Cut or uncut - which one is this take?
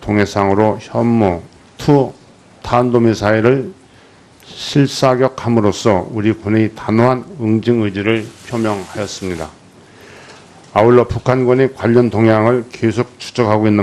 uncut